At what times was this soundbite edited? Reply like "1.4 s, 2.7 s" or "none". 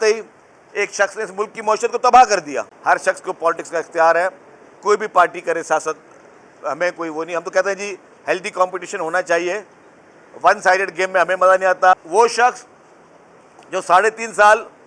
2.7 s, 11.9 s